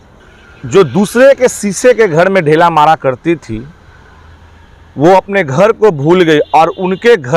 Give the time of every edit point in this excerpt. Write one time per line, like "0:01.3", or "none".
none